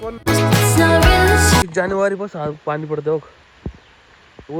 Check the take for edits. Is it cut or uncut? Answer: cut